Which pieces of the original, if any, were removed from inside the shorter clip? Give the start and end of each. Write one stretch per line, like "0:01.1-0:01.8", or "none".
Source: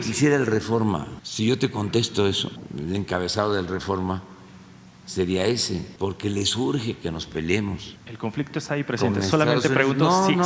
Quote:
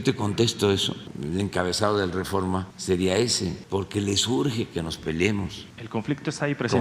0:04.3-0:05.0